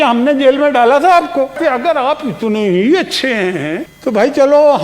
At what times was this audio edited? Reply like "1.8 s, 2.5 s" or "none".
1.6 s